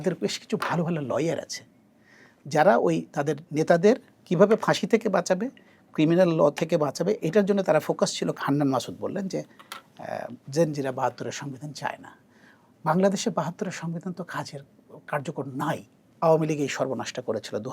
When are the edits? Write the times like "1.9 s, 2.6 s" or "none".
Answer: 8.3 s, 16.1 s